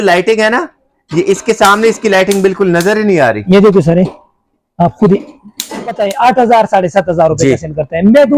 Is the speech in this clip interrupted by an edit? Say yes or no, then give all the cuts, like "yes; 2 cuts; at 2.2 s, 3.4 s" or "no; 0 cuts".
yes; 1 cut; at 5.9 s